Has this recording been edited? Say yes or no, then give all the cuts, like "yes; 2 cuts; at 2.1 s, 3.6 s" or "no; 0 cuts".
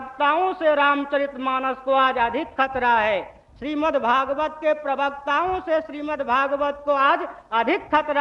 no; 0 cuts